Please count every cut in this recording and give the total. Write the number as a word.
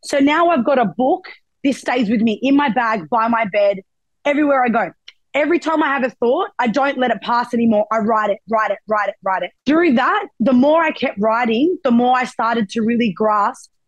two